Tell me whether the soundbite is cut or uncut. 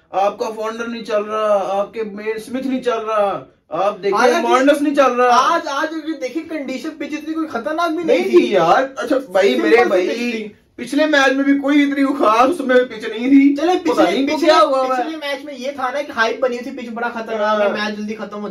uncut